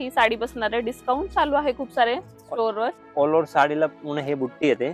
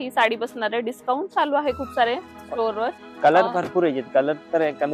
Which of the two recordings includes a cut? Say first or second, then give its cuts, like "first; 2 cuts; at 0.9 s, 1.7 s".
second; 1 cut; at 3.0 s